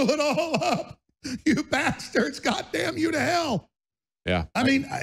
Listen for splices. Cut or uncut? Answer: uncut